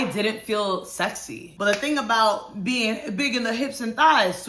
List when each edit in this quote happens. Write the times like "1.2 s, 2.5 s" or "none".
1.6 s